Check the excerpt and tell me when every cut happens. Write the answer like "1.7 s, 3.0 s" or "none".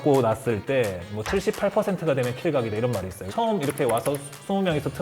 3.2 s